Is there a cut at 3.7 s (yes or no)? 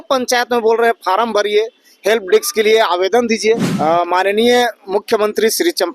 yes